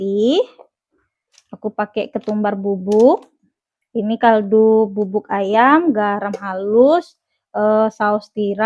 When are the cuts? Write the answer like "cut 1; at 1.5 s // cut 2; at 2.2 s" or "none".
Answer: none

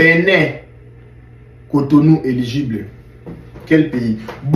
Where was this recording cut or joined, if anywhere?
none

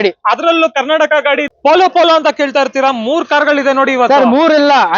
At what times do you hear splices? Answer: cut 1; at 1.5 s

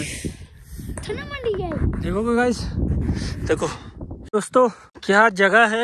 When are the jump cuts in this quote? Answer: cut 1; at 4.1 s // cut 2; at 4.9 s

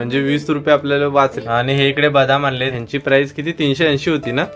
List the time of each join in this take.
cut 1; at 1.4 s // cut 2; at 2.7 s

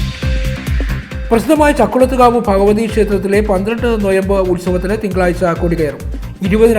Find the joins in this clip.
cut 1; at 1.1 s

